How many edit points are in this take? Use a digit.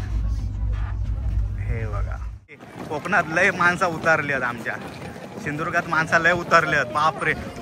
1